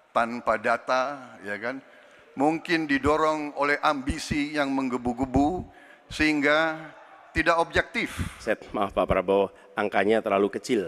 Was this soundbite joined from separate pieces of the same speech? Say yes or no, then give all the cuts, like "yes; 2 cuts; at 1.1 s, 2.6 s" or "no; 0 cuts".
yes; 1 cut; at 8.4 s